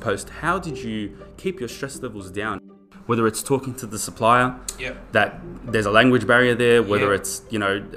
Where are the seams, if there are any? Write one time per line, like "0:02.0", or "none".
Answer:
0:02.7